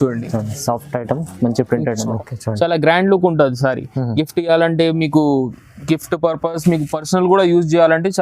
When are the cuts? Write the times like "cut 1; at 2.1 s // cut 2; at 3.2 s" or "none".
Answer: cut 1; at 2.1 s